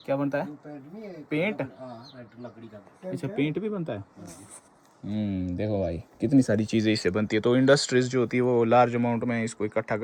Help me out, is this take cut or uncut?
uncut